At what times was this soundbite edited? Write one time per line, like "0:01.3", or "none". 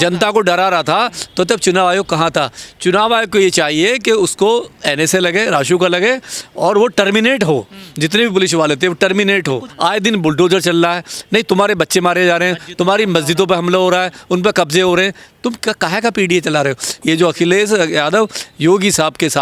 0:09.7
0:16.9